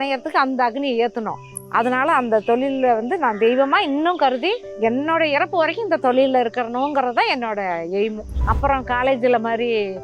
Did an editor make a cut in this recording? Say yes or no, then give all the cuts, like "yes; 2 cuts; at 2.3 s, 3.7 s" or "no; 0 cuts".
yes; 1 cut; at 8.4 s